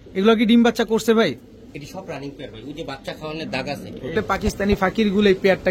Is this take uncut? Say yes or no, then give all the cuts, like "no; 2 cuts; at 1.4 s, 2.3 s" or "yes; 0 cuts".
no; 1 cut; at 4.1 s